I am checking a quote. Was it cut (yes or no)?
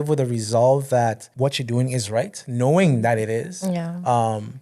yes